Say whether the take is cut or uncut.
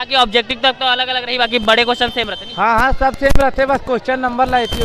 uncut